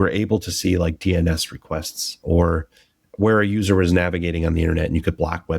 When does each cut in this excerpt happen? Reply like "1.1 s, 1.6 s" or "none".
2.2 s